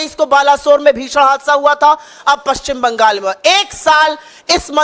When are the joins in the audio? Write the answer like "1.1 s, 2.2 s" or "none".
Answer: none